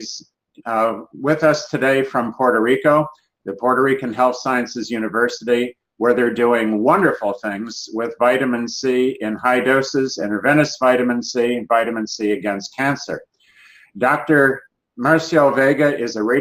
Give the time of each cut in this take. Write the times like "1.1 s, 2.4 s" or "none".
11.3 s